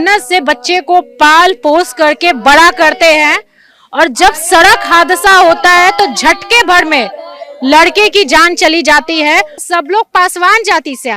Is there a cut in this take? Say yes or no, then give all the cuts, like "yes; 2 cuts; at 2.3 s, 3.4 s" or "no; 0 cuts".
yes; 1 cut; at 9.6 s